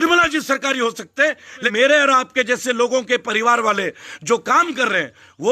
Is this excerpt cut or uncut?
cut